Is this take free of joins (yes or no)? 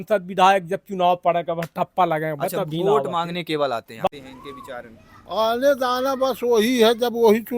no